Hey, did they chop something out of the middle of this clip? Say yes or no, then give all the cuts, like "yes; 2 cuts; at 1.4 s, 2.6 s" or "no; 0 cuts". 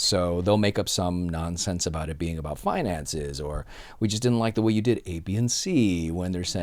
no; 0 cuts